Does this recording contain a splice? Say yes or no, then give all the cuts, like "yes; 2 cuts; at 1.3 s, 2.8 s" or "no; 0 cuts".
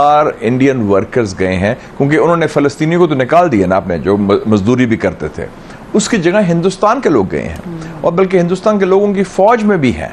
no; 0 cuts